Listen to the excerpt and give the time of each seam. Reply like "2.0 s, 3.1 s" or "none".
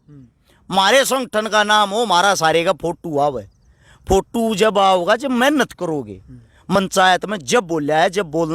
6.7 s